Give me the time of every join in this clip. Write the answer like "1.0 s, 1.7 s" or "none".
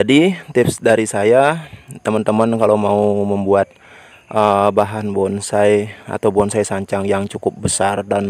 none